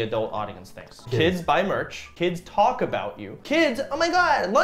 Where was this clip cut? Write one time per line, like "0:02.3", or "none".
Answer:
0:00.9
0:02.0